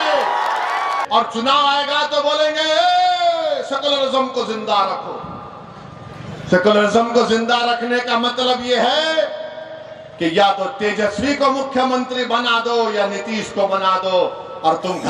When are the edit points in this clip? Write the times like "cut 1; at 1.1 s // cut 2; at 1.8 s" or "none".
cut 1; at 1.0 s